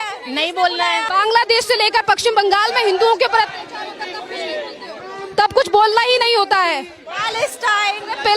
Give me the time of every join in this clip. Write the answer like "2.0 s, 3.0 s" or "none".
1.0 s